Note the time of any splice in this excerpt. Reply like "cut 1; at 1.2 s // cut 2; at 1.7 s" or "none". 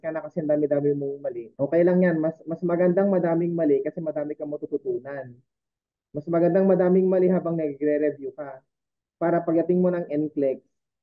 cut 1; at 1.4 s

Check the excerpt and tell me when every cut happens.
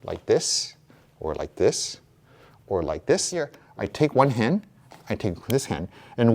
cut 1; at 3.6 s

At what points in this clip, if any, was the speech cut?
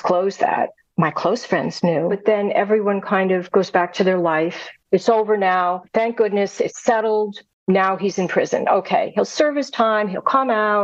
cut 1; at 2.2 s // cut 2; at 4.8 s // cut 3; at 5.8 s // cut 4; at 7.5 s

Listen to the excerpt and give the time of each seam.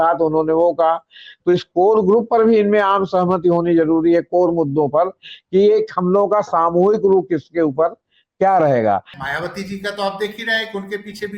cut 1; at 9.1 s

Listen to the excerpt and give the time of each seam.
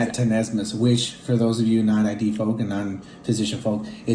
none

